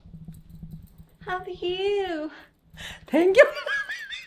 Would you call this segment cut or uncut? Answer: uncut